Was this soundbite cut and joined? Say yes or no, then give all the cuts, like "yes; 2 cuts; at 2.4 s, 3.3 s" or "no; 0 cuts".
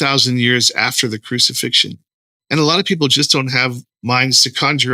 yes; 1 cut; at 3.9 s